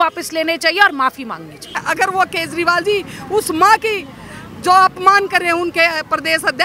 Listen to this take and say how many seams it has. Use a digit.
1